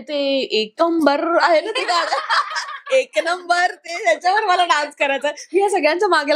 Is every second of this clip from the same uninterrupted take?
yes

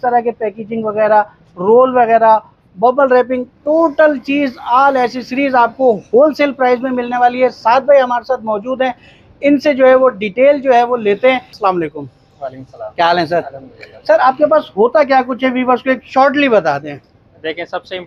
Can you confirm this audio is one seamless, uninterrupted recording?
yes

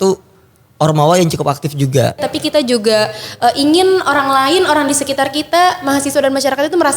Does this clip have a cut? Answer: yes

